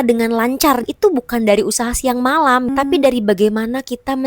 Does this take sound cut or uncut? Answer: cut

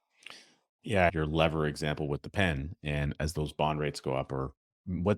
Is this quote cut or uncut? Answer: cut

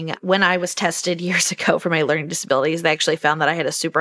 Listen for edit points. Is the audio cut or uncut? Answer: uncut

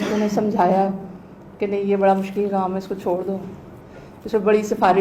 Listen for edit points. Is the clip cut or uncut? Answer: uncut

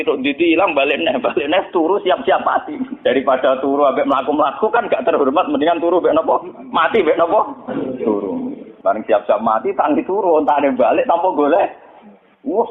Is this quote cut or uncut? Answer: cut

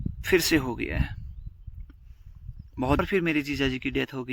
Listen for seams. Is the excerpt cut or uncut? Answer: cut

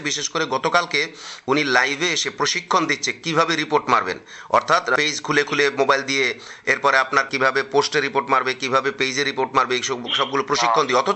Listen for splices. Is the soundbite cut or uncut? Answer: uncut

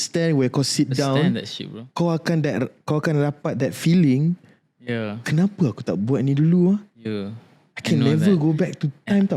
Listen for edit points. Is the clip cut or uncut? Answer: uncut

